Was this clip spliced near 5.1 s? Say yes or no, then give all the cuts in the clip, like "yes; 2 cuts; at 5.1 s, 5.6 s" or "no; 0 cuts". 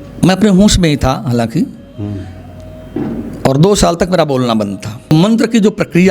yes; 1 cut; at 5.1 s